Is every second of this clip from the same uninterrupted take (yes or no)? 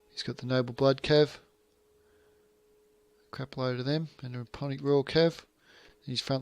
no